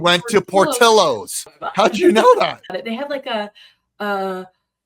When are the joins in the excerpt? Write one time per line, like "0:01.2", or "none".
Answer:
0:01.6
0:02.7